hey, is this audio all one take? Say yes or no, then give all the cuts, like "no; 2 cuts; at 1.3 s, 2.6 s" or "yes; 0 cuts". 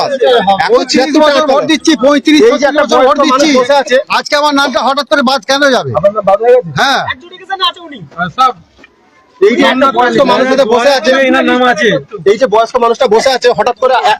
yes; 0 cuts